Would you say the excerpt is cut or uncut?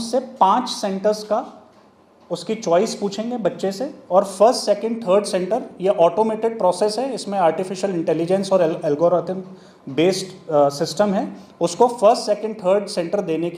uncut